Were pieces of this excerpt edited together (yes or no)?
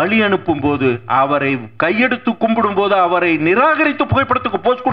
no